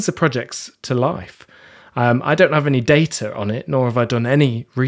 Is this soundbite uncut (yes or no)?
yes